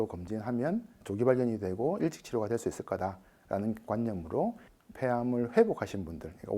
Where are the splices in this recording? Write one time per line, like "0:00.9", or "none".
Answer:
0:04.7